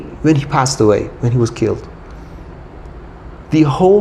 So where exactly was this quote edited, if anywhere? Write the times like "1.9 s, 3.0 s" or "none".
none